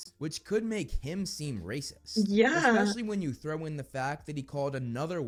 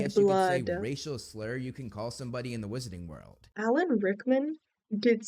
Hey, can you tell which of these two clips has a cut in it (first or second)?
second